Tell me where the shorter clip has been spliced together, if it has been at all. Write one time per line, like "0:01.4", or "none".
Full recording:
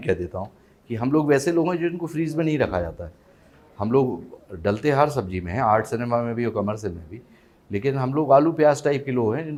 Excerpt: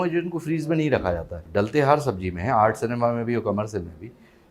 0:01.3